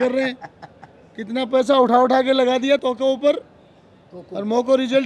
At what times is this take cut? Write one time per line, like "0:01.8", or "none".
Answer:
0:02.8